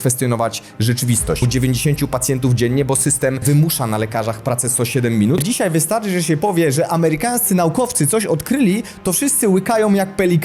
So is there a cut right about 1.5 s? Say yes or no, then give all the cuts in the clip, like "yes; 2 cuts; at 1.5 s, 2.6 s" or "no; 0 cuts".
yes; 3 cuts; at 1.5 s, 3.4 s, 5.4 s